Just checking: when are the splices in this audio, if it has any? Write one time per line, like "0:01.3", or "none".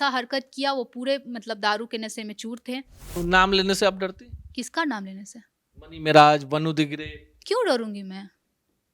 0:03.1